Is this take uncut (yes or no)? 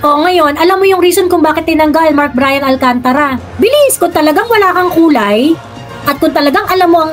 yes